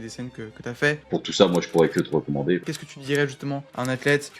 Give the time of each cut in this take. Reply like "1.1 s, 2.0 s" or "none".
1.1 s, 2.7 s